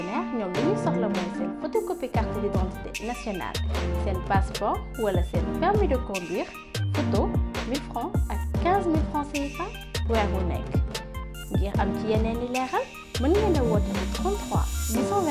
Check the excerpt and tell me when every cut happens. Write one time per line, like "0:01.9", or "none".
none